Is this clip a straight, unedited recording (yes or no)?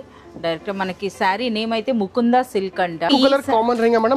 no